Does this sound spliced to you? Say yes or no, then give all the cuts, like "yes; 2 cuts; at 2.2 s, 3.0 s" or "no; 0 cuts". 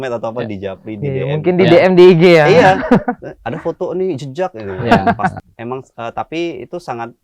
yes; 1 cut; at 5.5 s